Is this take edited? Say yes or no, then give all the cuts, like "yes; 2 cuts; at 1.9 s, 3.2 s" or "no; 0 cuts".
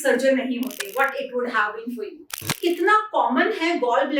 yes; 1 cut; at 2.6 s